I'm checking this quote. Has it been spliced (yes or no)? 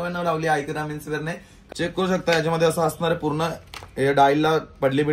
yes